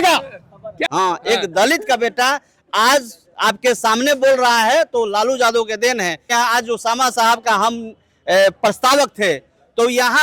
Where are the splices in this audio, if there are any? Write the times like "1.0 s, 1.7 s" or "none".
0.8 s, 6.3 s